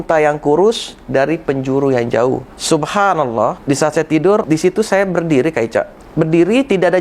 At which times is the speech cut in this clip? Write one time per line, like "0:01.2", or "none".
0:02.5
0:03.6
0:04.4
0:06.0